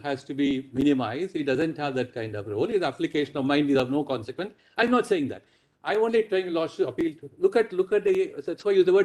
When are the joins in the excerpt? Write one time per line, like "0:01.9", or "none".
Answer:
none